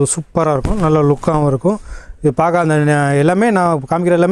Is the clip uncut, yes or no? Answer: yes